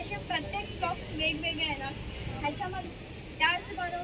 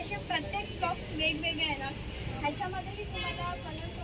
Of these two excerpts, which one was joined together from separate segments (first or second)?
first